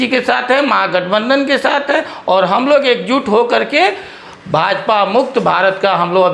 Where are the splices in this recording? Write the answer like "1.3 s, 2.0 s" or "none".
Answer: none